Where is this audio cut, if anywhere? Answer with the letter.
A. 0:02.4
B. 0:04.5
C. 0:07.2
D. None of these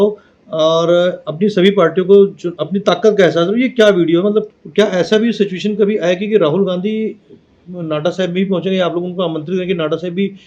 B